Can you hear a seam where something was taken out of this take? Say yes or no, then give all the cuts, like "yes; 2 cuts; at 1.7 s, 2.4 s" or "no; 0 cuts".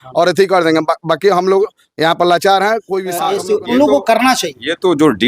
yes; 1 cut; at 3.2 s